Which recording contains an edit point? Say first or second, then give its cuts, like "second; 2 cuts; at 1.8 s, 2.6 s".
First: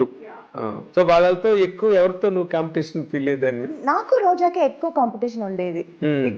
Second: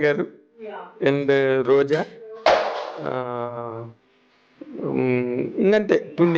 first; 2 cuts; at 0.8 s, 3.7 s